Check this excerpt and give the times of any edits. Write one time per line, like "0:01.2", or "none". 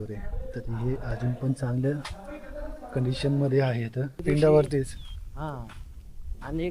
0:04.2